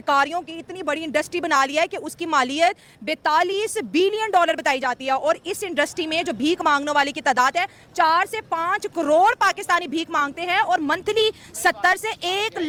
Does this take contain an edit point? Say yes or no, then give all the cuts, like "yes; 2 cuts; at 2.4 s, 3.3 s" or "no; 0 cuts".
no; 0 cuts